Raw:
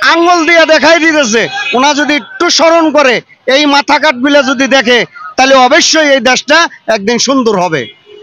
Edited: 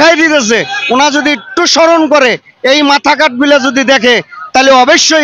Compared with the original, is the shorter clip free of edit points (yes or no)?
yes